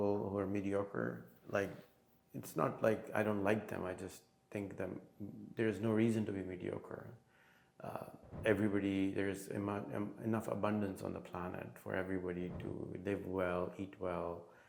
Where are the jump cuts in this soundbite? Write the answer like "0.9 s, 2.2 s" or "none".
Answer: none